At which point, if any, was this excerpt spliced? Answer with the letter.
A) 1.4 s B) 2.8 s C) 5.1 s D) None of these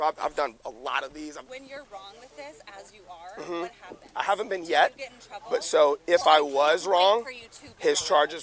A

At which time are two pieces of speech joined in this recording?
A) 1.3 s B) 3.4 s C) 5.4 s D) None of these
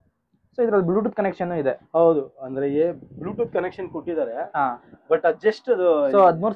D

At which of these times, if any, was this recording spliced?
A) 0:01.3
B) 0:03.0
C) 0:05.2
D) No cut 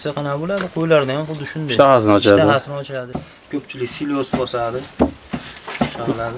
B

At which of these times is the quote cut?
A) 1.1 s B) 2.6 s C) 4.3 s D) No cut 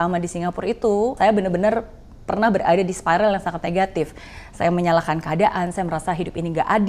A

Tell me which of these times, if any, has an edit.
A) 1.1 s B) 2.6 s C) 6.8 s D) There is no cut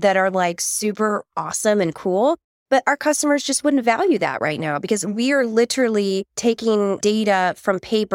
C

